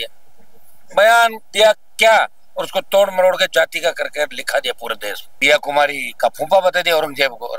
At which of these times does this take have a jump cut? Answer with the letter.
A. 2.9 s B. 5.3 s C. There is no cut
B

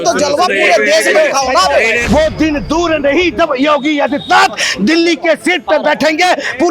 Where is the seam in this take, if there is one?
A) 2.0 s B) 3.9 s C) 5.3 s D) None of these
A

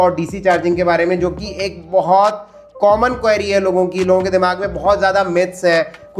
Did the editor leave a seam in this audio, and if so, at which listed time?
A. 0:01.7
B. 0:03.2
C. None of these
C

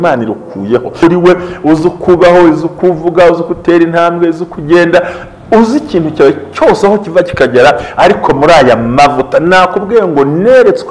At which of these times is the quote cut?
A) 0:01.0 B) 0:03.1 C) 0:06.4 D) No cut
A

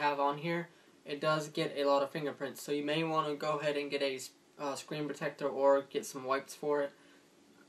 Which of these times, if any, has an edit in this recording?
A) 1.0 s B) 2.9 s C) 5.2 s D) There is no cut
C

